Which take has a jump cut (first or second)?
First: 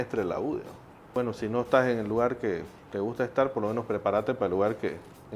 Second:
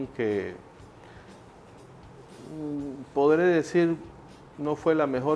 first